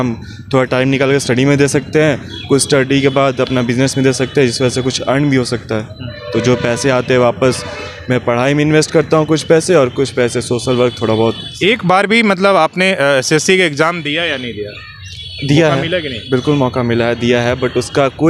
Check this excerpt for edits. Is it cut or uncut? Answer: uncut